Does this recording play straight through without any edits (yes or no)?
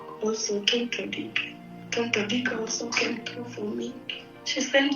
no